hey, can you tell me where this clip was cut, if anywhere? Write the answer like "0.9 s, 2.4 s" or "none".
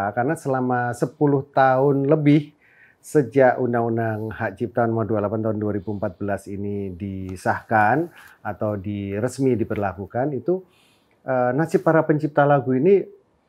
none